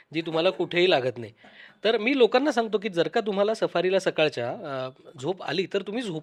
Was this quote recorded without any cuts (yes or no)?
yes